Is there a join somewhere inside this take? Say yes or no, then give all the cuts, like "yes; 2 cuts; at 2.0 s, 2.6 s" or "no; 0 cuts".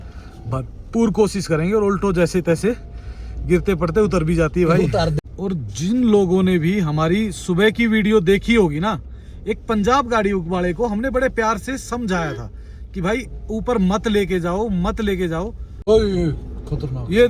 yes; 2 cuts; at 5.2 s, 15.7 s